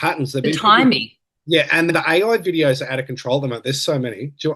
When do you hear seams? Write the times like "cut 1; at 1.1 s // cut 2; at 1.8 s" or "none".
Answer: cut 1; at 1.9 s